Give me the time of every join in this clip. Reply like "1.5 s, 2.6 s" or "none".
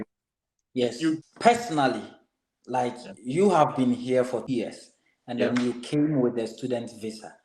1.2 s, 4.5 s